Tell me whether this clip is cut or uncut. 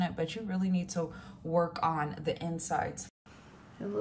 cut